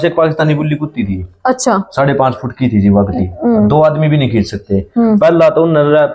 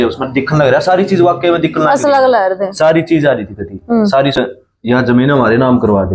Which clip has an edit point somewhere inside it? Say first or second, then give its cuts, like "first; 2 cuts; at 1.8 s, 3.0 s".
second; 1 cut; at 4.4 s